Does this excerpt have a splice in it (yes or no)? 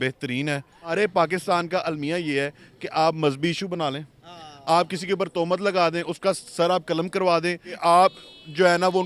yes